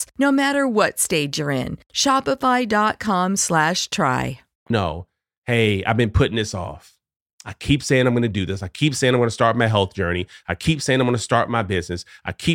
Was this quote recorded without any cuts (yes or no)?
yes